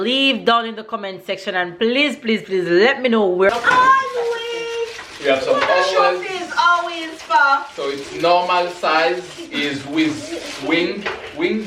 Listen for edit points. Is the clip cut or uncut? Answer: cut